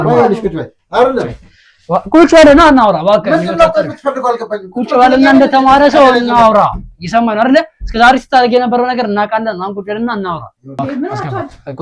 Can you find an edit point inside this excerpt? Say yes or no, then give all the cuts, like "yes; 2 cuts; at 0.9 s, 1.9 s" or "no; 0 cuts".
yes; 1 cut; at 10.8 s